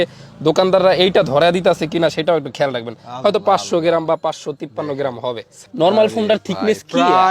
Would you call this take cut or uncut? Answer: cut